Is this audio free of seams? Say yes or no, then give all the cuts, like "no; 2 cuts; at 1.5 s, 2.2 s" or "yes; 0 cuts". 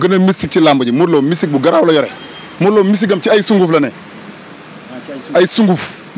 yes; 0 cuts